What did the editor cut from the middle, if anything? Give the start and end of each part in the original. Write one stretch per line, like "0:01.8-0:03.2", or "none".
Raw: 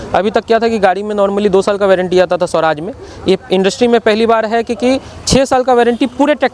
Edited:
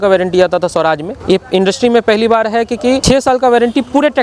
0:02.9-0:03.1
0:05.0-0:05.3